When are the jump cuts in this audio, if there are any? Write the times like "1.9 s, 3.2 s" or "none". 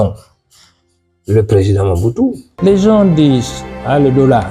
2.5 s

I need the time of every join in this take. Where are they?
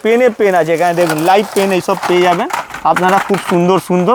none

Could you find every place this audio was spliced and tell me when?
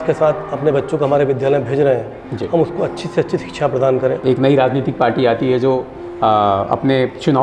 4.2 s

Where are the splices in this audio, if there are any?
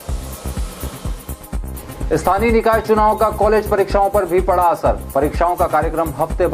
1.6 s

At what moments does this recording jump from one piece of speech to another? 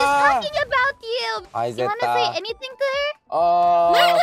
1.4 s, 3.2 s

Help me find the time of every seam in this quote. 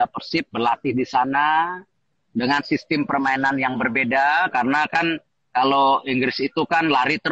none

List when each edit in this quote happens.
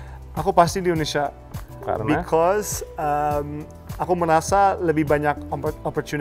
none

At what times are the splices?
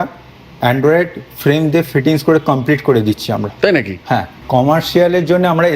4.3 s

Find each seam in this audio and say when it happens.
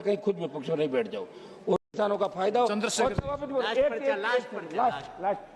1.8 s

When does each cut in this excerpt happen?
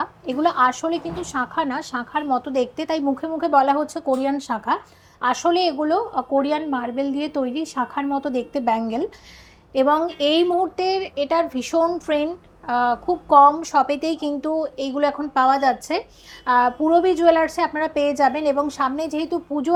none

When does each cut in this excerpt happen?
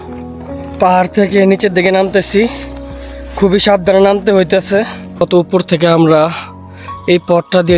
5.0 s

